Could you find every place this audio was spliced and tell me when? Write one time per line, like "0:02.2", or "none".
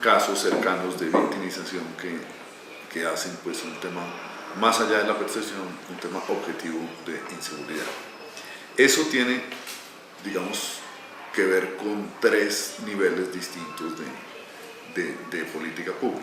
0:12.2